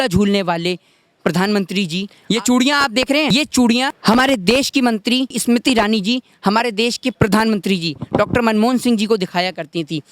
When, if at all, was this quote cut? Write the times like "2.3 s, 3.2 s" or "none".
2.1 s, 3.3 s, 4.0 s, 5.4 s, 7.1 s